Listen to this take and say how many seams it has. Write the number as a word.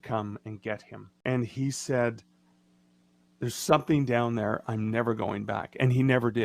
one